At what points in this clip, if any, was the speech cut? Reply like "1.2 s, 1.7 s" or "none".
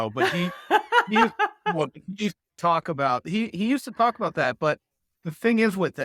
none